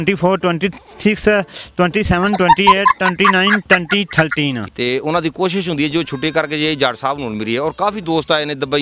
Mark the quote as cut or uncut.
cut